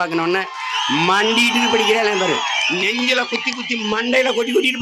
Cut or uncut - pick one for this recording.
uncut